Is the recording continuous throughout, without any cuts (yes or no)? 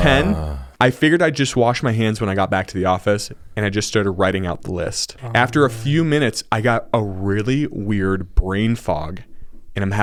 yes